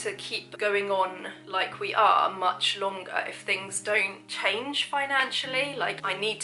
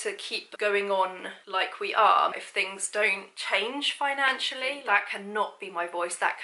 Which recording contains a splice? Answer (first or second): second